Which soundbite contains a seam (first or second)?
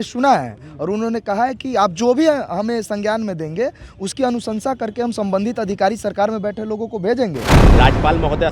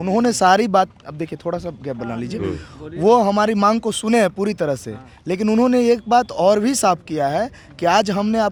first